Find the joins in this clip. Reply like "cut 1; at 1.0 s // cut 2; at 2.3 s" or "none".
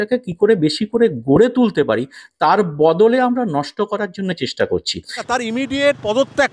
cut 1; at 5.1 s